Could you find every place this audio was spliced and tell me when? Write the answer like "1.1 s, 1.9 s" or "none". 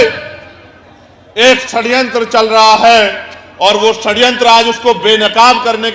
none